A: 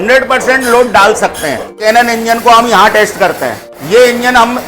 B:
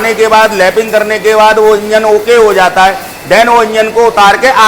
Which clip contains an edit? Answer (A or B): A